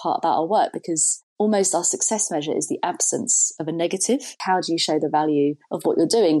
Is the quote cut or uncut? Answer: cut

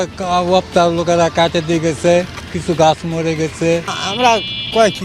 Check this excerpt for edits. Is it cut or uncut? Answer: cut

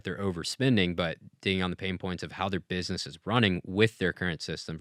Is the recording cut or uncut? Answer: uncut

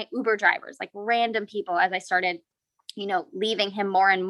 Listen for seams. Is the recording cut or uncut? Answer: uncut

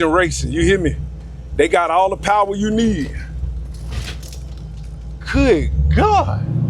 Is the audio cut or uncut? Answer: uncut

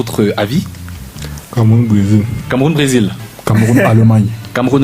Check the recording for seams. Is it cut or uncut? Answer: cut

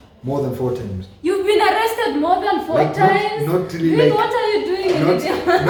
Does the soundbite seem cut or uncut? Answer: uncut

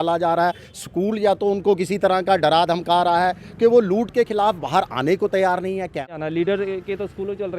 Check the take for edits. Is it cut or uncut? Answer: cut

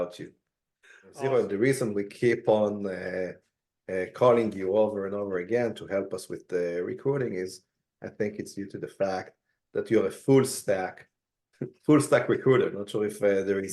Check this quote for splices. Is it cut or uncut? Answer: cut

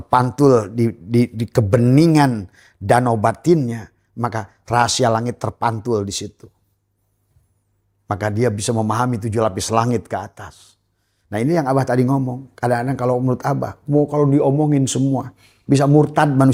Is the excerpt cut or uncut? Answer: uncut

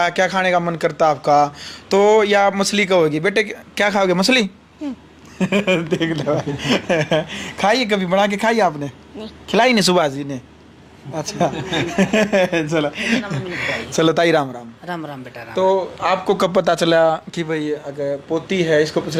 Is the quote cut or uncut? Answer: uncut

